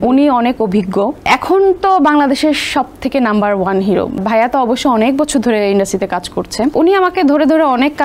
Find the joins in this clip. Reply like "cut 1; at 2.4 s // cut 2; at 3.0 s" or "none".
cut 1; at 1.2 s // cut 2; at 4.2 s // cut 3; at 6.7 s

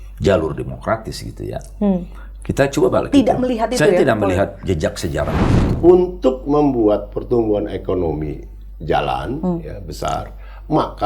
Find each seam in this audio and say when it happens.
cut 1; at 5.6 s

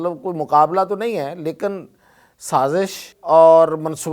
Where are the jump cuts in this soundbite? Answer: cut 1; at 3.1 s

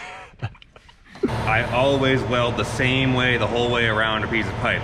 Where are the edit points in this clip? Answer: cut 1; at 1.3 s

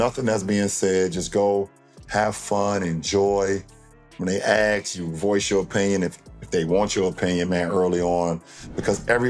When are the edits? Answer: cut 1; at 3.8 s

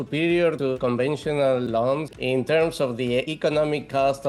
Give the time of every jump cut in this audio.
cut 1; at 0.8 s // cut 2; at 2.1 s // cut 3; at 3.3 s

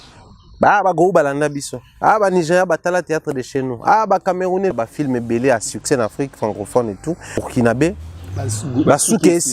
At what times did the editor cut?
cut 1; at 4.7 s // cut 2; at 7.4 s

